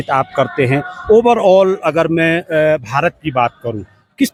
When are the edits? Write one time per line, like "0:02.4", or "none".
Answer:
none